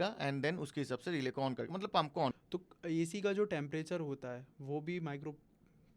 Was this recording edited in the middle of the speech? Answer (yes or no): yes